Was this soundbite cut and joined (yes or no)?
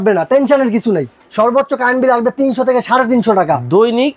yes